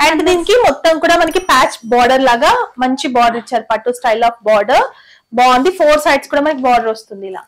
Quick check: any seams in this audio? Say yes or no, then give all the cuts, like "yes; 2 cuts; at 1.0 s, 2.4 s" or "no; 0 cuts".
no; 0 cuts